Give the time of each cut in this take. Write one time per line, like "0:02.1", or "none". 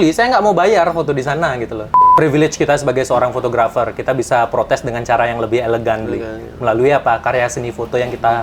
0:02.0